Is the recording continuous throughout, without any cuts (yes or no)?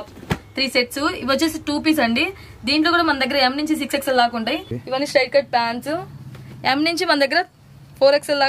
no